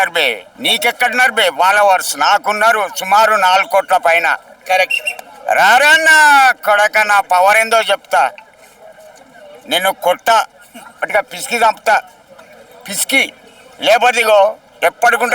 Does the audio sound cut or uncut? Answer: uncut